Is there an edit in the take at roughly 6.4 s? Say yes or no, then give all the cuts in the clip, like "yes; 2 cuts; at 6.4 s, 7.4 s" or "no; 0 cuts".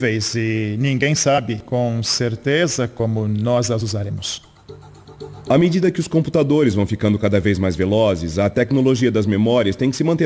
no; 0 cuts